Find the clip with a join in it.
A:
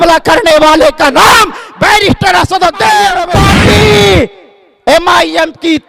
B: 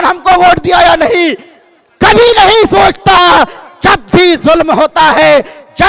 A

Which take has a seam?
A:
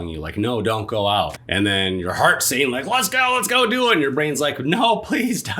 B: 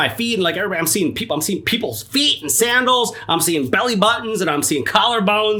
A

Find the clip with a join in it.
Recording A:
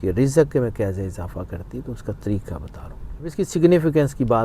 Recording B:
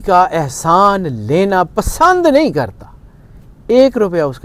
A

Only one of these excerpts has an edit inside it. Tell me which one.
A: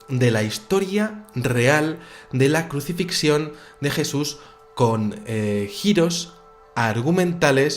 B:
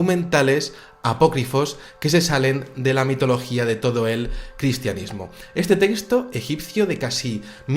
A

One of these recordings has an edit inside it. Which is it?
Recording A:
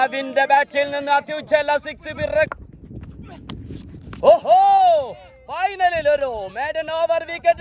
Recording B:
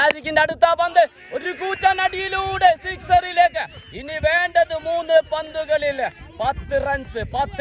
A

